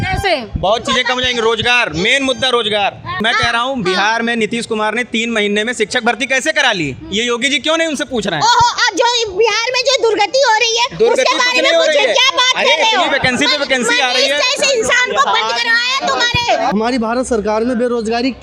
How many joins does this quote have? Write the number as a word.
two